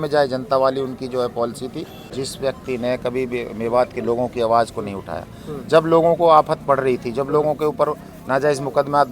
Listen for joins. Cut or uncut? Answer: cut